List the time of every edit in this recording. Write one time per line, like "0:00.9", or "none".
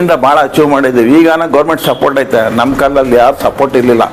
none